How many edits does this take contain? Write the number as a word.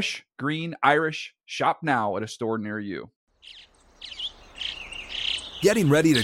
one